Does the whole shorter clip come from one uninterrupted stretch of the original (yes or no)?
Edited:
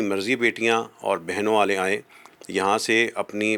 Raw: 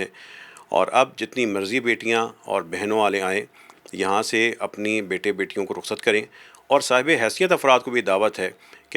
yes